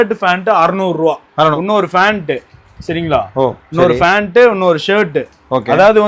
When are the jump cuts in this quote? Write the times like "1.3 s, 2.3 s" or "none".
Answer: 1.5 s